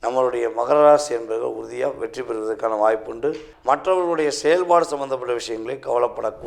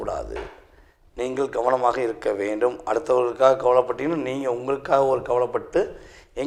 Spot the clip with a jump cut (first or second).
first